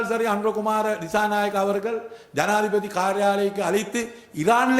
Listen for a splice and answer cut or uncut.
uncut